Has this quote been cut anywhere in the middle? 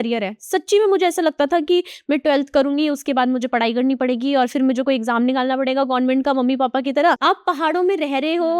yes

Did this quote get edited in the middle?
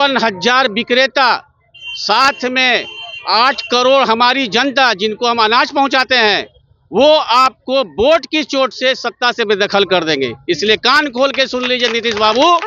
no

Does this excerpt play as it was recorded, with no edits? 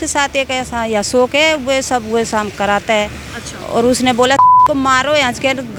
yes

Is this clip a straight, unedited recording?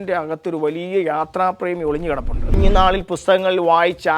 no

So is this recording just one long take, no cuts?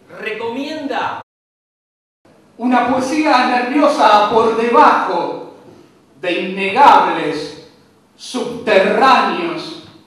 yes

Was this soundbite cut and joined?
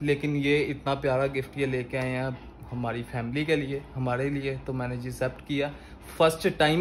no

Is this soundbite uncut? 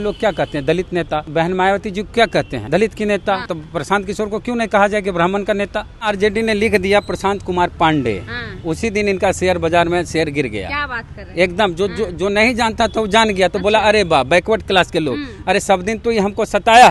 no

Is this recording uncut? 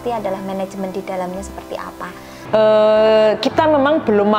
no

